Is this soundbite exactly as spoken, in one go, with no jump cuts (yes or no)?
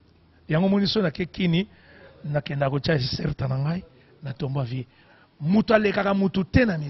no